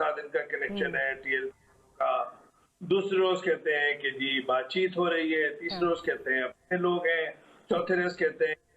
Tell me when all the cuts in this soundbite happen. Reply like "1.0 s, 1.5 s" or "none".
none